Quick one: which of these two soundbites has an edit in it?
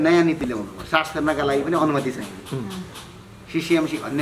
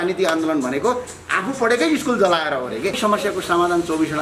second; 1 cut; at 3.0 s

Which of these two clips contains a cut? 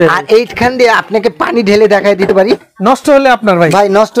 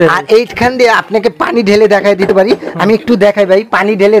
first; 1 cut; at 2.7 s

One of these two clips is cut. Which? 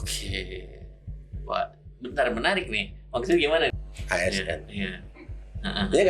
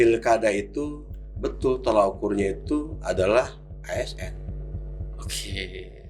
first; 1 cut; at 3.7 s

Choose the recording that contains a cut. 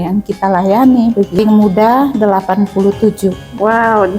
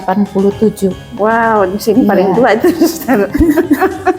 first; 1 cut; at 1.4 s

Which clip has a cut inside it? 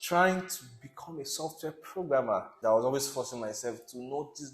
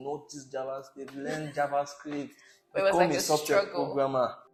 first; 1 cut; at 2.5 s

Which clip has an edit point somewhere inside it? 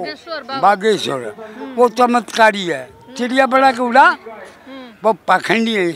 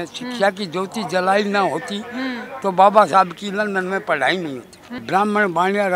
second; 1 cut; at 4.9 s

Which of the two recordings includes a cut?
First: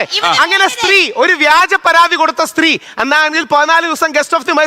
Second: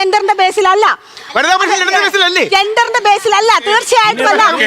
second; 1 cut; at 1.4 s

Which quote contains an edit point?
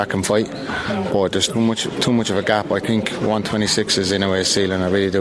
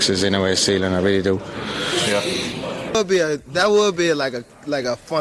second; 1 cut; at 3.0 s

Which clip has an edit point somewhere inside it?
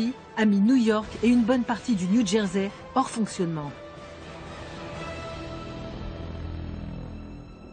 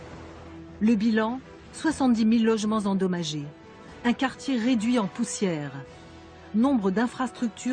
second; 1 cut; at 5.1 s

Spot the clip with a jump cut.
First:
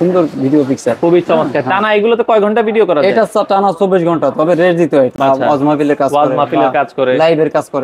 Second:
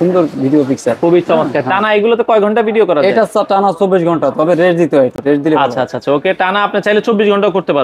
first; 1 cut; at 5.1 s

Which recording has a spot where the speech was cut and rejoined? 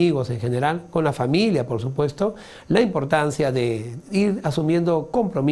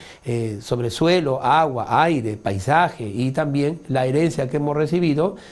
first; 1 cut; at 1.1 s

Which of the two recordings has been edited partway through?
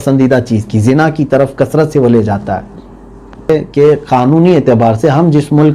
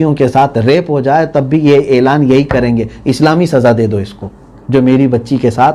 first; 1 cut; at 3.5 s

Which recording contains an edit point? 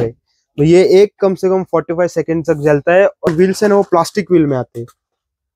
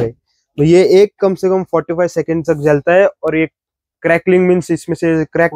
first; 1 cut; at 3.3 s

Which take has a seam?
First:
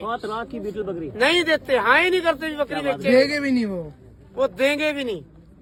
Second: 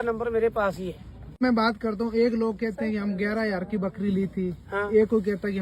second; 1 cut; at 1.4 s

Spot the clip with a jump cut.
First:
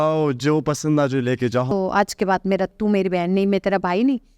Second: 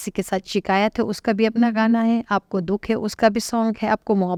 first; 2 cuts; at 1.7 s, 2.7 s

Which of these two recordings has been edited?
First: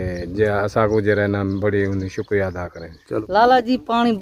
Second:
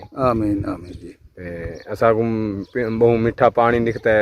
first; 1 cut; at 3.1 s

